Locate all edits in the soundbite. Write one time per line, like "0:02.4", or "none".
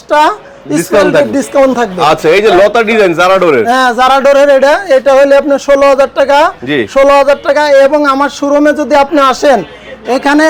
none